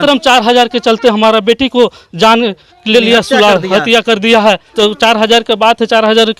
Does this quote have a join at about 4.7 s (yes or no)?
yes